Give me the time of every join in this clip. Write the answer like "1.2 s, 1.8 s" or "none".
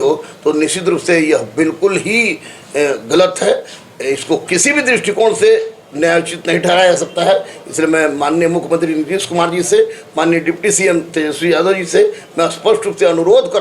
none